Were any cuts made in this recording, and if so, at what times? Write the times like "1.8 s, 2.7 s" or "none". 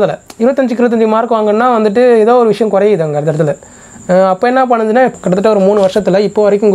5.1 s